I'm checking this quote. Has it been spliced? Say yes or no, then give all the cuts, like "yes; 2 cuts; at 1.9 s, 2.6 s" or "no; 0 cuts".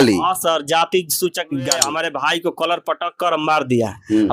yes; 1 cut; at 1.9 s